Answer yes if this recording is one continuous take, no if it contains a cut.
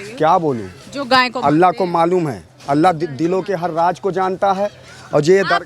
yes